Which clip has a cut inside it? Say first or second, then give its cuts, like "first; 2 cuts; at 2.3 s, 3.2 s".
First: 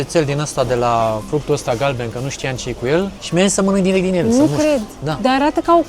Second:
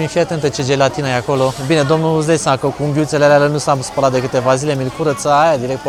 first; 2 cuts; at 1.2 s, 3.2 s